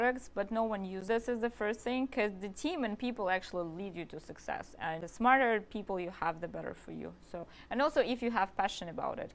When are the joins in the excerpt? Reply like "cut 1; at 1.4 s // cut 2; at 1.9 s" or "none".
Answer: cut 1; at 1.0 s // cut 2; at 5.0 s // cut 3; at 7.5 s